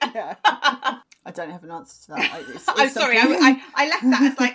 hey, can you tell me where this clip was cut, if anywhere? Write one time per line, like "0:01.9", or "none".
0:01.0